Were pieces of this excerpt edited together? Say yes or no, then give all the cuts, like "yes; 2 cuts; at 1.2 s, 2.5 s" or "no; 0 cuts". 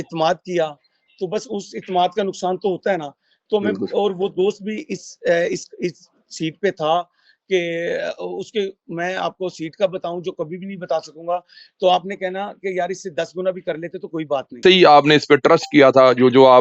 yes; 1 cut; at 14.6 s